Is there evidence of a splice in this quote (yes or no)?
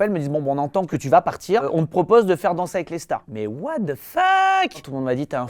yes